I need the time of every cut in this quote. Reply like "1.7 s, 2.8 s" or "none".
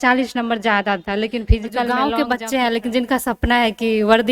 1.9 s